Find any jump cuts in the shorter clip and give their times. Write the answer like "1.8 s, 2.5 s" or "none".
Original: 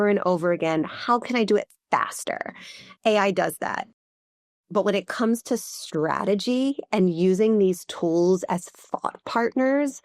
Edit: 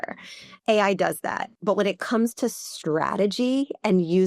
1.5 s

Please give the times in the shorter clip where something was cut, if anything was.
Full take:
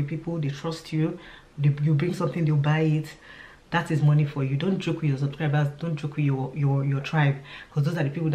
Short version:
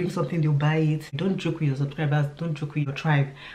1.1 s, 2.9 s

